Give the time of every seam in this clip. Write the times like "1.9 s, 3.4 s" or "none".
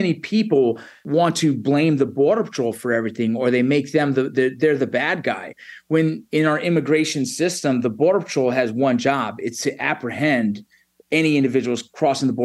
1.0 s